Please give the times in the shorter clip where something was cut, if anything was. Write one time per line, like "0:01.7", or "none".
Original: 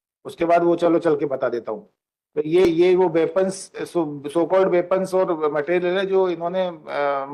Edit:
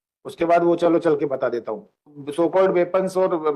0:02.2